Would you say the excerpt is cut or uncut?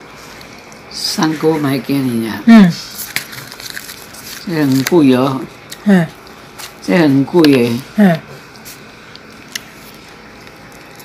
uncut